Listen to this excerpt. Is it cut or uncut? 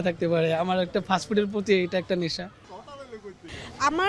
uncut